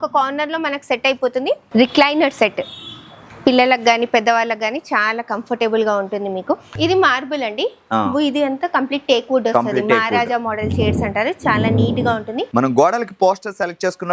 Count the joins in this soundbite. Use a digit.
3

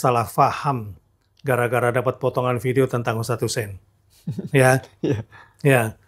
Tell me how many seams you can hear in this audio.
0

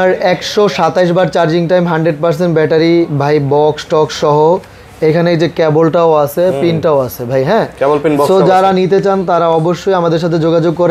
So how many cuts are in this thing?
0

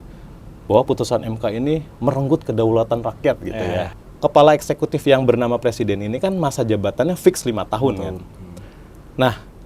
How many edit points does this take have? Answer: 1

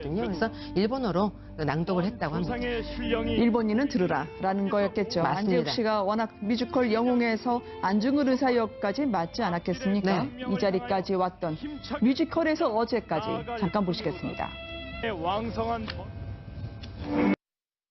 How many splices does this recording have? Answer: 1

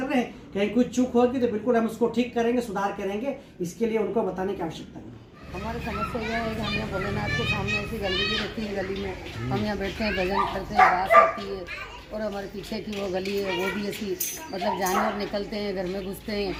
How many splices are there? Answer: 0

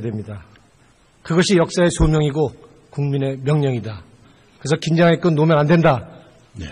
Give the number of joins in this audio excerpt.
1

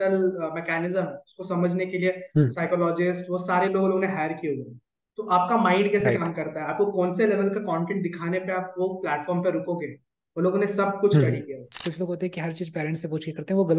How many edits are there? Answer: 1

